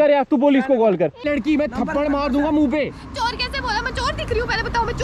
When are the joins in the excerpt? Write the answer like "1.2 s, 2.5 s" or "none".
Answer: 1.2 s

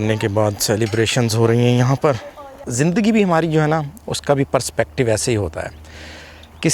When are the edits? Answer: 2.6 s

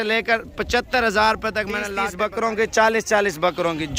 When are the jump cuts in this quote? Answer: 1.9 s

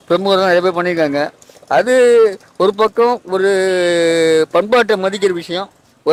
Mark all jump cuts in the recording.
none

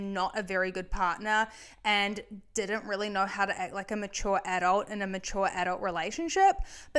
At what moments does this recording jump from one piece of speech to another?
none

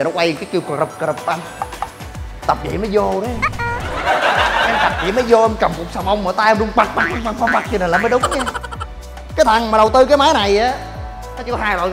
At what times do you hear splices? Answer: 1.9 s, 8.5 s

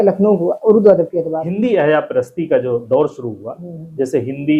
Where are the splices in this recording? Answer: 1.4 s

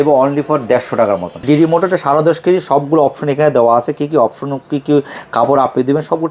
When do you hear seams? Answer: 1.4 s

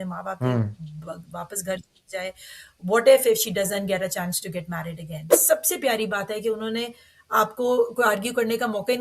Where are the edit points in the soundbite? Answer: 5.4 s

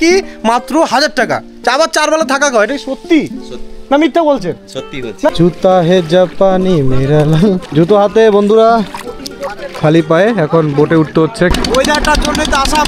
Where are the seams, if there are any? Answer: 5.3 s, 7.6 s, 11.5 s

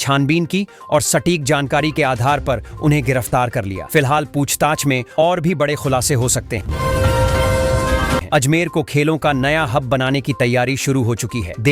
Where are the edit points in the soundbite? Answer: 6.7 s, 8.3 s

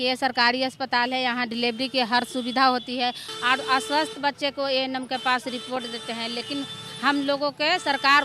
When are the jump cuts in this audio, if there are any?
3.3 s

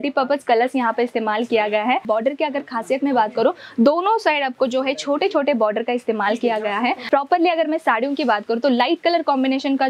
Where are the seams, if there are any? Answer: 2.0 s, 7.1 s

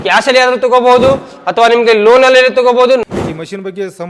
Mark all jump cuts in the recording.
3.0 s

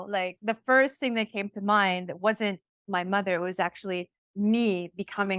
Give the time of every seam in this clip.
2.7 s, 4.2 s

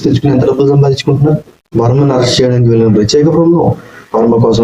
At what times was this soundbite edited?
1.6 s

